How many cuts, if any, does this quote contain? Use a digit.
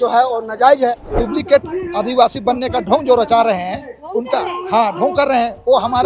1